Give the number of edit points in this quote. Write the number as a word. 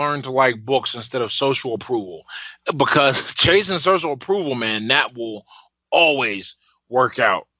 one